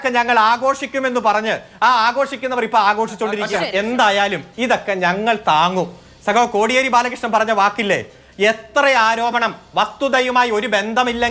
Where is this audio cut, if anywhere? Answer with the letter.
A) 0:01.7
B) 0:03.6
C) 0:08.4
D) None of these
B